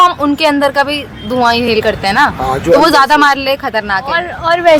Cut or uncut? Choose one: uncut